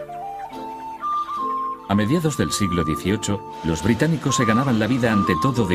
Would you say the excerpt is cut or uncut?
uncut